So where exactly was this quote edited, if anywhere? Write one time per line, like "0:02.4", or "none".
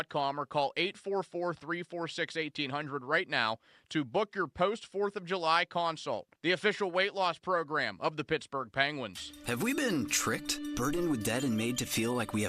0:09.2